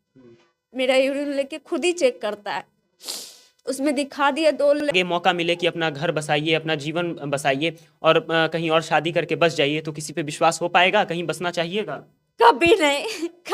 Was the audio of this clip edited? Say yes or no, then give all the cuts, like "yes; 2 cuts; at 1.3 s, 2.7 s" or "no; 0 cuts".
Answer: yes; 1 cut; at 4.9 s